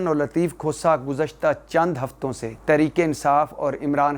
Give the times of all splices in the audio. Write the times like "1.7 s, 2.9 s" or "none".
2.5 s